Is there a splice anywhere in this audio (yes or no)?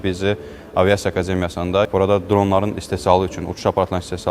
yes